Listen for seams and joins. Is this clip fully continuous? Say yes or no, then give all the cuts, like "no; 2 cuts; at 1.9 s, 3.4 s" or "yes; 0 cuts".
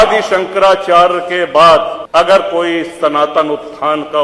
no; 1 cut; at 2.0 s